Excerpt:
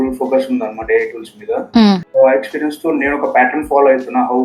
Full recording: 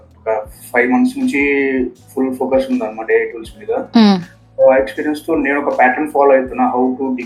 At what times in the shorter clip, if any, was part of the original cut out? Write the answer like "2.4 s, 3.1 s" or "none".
2.1 s